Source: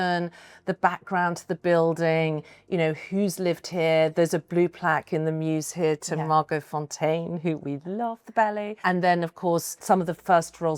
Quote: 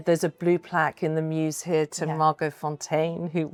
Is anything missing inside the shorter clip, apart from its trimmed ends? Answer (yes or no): no